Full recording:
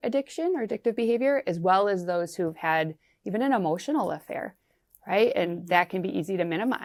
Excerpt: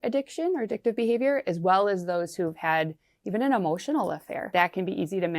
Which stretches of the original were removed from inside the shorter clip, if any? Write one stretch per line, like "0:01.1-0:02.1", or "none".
0:04.4-0:05.6